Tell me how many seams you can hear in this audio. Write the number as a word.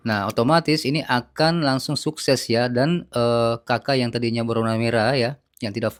zero